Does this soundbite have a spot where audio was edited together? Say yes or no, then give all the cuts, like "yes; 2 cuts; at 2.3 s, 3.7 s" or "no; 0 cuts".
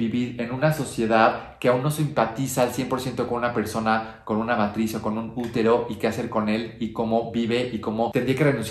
no; 0 cuts